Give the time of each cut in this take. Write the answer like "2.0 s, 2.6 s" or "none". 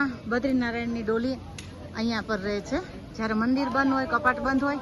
none